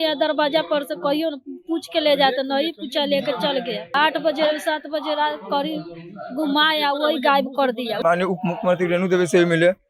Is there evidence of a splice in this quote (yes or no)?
yes